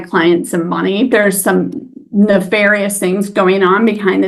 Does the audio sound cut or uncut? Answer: cut